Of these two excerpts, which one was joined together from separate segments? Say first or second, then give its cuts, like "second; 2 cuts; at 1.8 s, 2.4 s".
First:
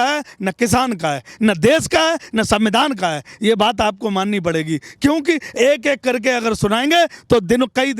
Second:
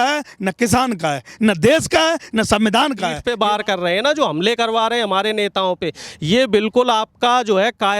second; 1 cut; at 3.2 s